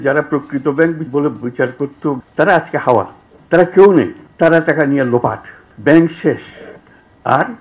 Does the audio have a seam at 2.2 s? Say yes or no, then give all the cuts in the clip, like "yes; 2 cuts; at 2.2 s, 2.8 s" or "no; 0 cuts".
yes; 2 cuts; at 1.0 s, 2.2 s